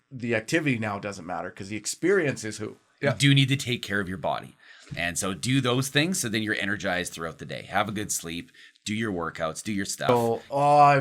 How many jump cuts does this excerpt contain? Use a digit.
2